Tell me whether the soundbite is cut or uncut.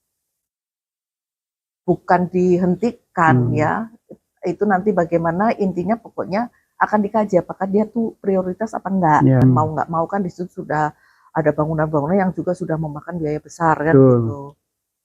cut